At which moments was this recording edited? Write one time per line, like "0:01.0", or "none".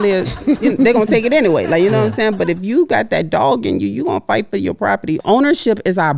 0:05.2